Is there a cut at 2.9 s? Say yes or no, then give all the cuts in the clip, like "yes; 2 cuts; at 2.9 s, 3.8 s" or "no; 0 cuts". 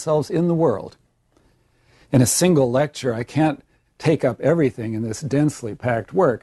yes; 1 cut; at 2.9 s